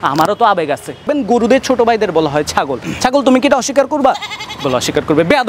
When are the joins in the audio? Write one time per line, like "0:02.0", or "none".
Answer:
0:01.1